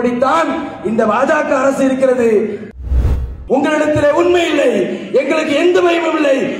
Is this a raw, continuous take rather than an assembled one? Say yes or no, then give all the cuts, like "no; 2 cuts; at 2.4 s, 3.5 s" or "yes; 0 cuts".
no; 1 cut; at 2.8 s